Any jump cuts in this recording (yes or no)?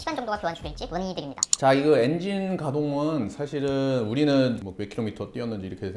no